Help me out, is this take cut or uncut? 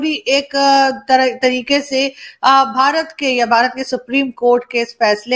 uncut